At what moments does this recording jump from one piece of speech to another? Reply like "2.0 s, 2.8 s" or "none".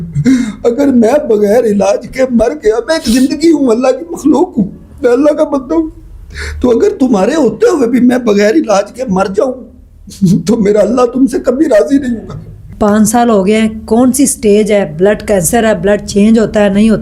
12.7 s